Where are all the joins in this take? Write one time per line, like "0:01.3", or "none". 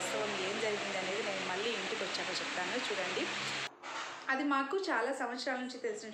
0:03.7